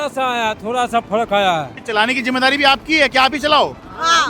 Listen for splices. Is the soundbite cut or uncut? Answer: cut